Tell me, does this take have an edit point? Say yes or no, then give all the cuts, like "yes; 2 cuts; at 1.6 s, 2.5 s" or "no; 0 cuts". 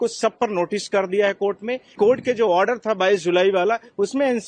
yes; 1 cut; at 1.9 s